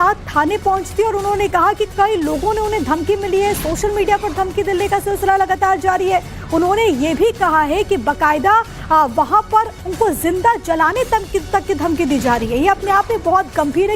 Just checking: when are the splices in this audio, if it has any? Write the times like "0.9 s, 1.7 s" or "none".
1.6 s